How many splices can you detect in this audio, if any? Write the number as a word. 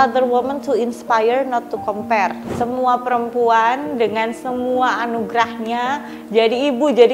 one